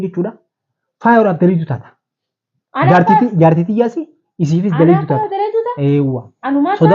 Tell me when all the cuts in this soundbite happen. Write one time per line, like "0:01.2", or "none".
none